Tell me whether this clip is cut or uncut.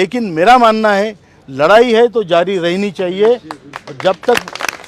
uncut